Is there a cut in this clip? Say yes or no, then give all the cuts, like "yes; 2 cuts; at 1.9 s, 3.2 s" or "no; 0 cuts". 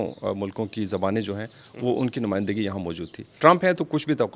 yes; 1 cut; at 3.3 s